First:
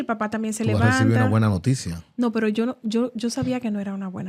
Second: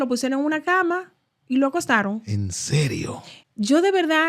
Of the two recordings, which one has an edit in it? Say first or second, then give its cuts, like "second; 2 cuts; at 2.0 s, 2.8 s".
second; 1 cut; at 3.3 s